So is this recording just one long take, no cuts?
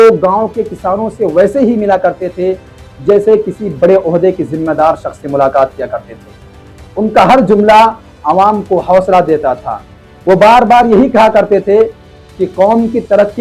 yes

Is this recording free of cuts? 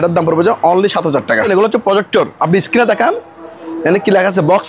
no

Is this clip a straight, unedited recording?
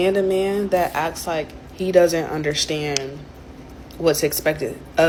yes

